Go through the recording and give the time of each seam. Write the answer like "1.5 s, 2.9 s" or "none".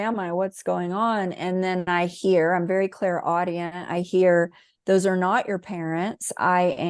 none